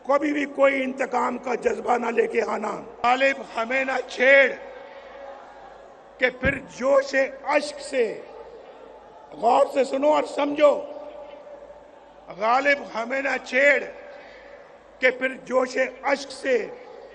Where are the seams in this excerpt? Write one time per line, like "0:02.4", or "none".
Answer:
0:03.0